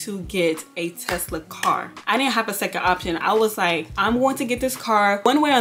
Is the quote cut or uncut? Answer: uncut